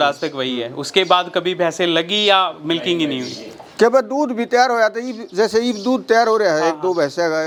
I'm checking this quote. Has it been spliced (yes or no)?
no